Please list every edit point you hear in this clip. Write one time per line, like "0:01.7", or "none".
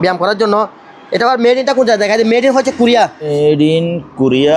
0:03.3